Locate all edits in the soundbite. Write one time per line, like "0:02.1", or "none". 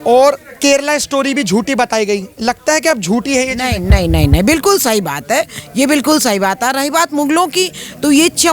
none